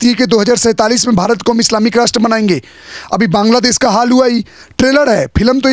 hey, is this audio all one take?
yes; 0 cuts

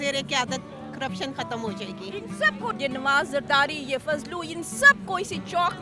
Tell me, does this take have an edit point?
yes; 1 cut; at 2.8 s

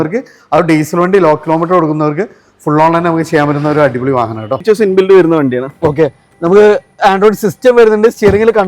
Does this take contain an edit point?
yes; 1 cut; at 4.6 s

